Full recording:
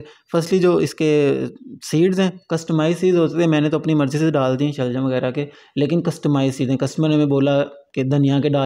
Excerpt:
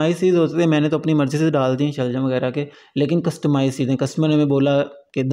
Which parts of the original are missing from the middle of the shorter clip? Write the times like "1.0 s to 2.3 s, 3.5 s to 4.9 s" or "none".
none